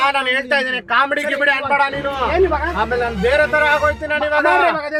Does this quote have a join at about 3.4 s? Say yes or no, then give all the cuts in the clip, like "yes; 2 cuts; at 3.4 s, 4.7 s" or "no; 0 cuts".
no; 0 cuts